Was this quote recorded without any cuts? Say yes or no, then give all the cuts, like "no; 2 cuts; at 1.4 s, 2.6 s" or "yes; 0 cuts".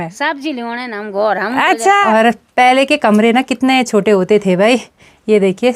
no; 1 cut; at 2.0 s